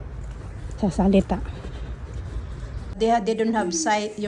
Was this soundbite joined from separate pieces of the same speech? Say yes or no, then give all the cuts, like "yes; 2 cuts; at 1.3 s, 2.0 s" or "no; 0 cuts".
yes; 1 cut; at 2.9 s